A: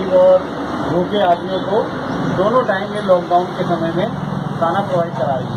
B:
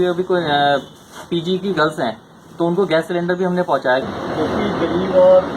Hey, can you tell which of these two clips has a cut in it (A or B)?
B